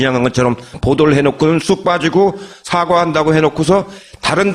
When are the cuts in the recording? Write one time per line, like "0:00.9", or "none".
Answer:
none